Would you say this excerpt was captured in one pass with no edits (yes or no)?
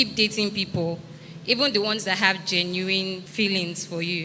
no